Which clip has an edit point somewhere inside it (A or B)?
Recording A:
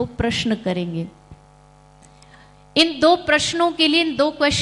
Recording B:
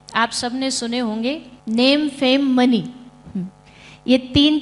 B